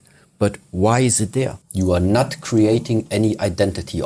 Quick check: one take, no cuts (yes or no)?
no